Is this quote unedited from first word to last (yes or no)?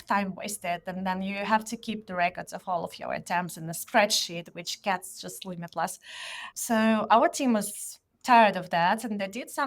yes